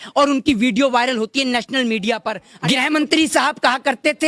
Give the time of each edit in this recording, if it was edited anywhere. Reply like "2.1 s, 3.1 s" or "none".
2.5 s